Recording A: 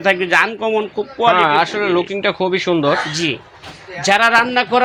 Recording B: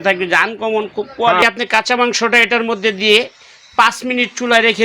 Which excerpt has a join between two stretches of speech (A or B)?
B